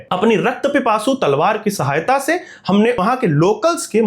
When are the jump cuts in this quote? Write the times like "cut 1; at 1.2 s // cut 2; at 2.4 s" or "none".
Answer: cut 1; at 3.0 s